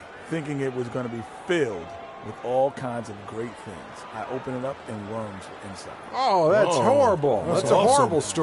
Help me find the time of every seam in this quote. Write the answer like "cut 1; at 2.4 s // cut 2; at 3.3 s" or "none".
none